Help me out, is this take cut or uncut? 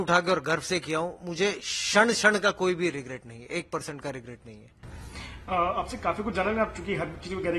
uncut